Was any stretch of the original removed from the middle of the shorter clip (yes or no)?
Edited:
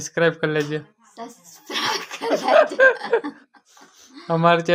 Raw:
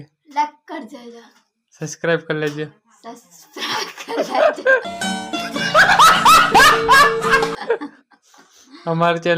yes